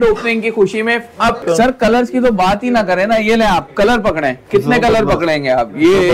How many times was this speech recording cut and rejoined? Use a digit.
1